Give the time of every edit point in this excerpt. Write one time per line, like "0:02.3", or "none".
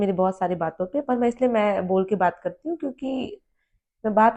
none